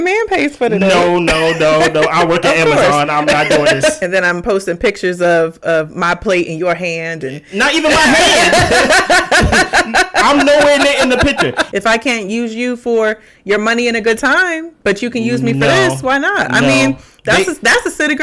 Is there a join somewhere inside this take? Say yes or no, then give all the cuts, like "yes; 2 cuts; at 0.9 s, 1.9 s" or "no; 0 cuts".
yes; 2 cuts; at 4.0 s, 11.6 s